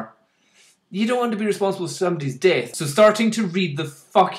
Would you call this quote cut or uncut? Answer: cut